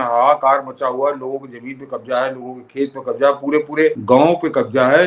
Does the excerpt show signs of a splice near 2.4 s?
no; 1 cut; at 4.0 s

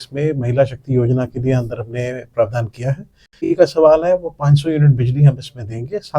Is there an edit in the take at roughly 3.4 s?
yes; 1 cut; at 3.4 s

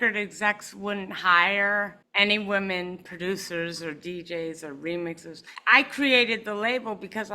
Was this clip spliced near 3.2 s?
no; 2 cuts; at 2.0 s, 5.5 s

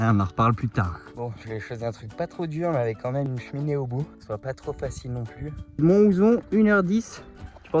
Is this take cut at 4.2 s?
yes; 3 cuts; at 1.0 s, 4.2 s, 5.8 s

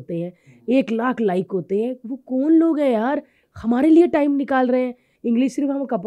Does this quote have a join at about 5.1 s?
yes; 1 cut; at 5.1 s

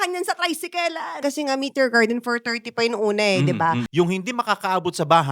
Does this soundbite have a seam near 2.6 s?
no; 2 cuts; at 1.1 s, 3.9 s

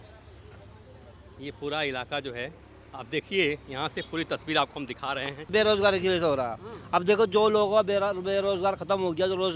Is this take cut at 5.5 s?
yes; 1 cut; at 5.5 s

